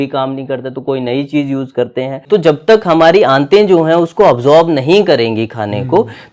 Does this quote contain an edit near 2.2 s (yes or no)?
yes